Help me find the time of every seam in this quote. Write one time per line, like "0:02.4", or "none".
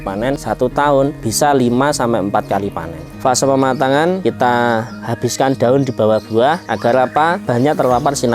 0:03.1